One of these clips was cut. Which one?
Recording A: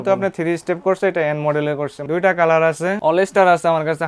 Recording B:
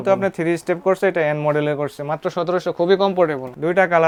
A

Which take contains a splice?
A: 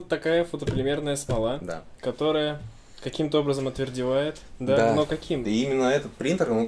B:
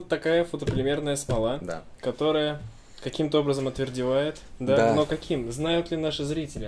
A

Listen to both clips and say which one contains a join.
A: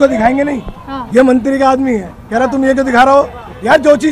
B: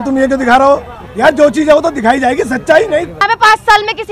B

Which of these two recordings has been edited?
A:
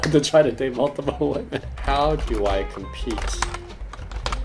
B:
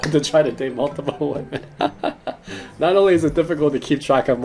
A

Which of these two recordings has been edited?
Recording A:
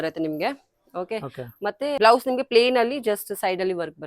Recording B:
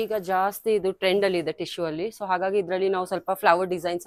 A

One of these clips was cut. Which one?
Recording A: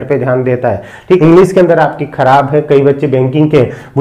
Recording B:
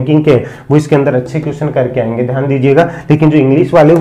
A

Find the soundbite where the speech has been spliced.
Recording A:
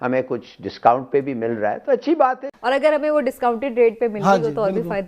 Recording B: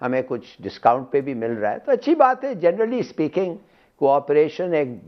A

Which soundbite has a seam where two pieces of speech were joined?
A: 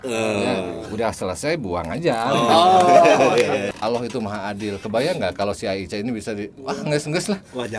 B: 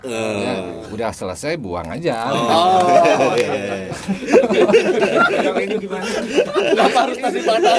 A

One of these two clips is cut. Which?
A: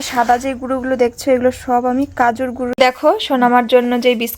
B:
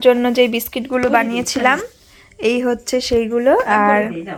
A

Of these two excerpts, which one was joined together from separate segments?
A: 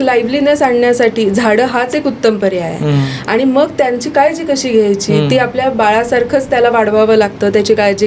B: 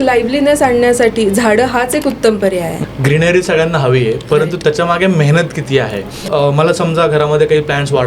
B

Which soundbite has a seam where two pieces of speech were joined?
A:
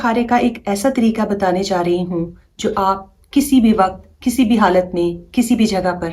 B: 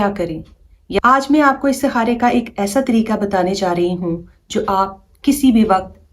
B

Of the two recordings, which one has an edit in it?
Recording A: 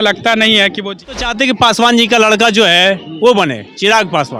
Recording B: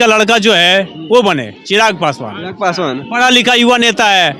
A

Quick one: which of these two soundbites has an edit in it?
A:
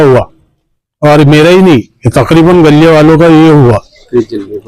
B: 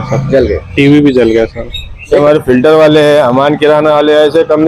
B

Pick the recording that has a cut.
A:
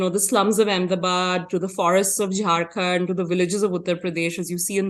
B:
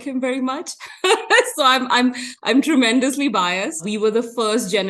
B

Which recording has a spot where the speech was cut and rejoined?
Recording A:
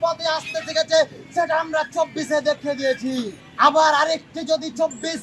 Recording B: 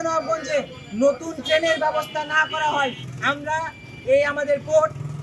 B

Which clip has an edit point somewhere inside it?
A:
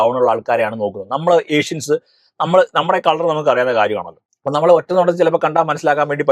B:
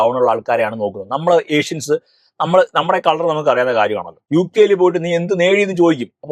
B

